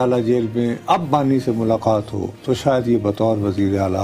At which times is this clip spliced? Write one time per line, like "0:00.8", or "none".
none